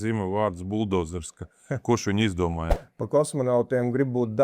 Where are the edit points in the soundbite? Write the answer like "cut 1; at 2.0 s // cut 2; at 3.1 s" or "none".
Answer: cut 1; at 2.7 s